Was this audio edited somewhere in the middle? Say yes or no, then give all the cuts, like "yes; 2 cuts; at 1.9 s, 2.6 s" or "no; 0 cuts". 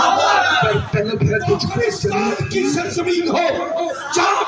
yes; 1 cut; at 2.4 s